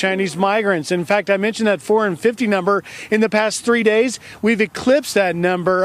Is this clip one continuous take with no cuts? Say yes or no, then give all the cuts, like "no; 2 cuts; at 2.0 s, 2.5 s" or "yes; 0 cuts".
yes; 0 cuts